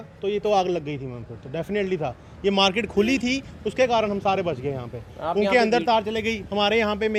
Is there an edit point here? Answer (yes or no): no